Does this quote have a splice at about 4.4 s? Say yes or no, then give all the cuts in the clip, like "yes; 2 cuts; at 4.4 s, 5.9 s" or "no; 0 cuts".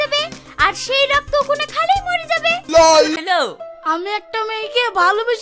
no; 1 cut; at 3.2 s